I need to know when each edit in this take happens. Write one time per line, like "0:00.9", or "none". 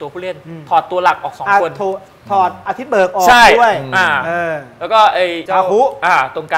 0:02.7
0:05.4